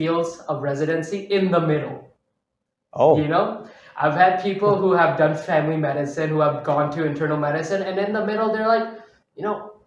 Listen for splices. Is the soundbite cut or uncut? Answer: uncut